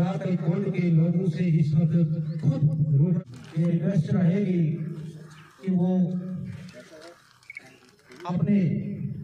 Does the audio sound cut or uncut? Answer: cut